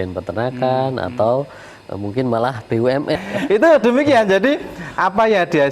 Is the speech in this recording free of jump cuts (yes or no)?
no